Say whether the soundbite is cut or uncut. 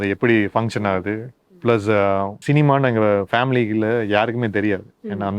cut